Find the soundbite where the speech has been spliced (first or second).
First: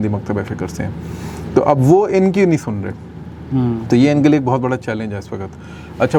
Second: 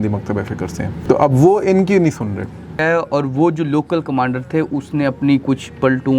second